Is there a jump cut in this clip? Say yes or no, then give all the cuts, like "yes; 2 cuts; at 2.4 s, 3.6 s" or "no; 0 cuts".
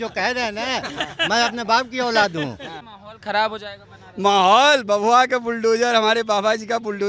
yes; 1 cut; at 2.8 s